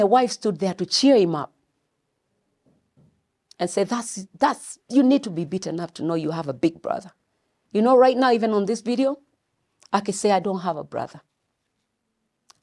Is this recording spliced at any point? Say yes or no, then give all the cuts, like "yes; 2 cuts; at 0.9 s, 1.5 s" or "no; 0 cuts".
no; 0 cuts